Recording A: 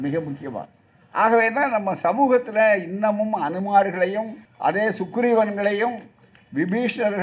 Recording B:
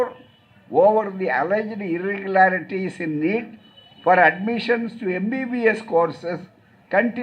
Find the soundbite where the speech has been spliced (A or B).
A